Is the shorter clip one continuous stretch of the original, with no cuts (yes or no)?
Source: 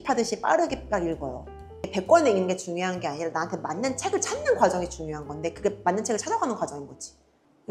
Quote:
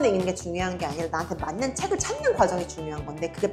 yes